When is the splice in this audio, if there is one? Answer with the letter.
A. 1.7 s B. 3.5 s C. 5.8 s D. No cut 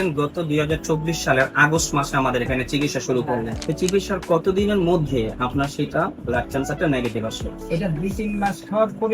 B